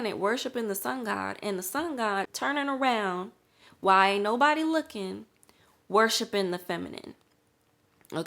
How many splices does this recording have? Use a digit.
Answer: 1